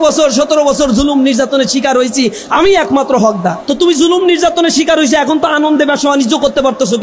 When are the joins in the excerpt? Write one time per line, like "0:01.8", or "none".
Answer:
0:03.6